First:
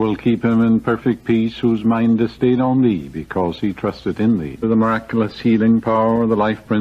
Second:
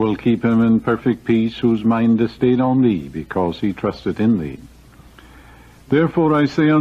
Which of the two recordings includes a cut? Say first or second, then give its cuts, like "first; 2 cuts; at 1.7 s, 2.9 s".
second; 1 cut; at 4.6 s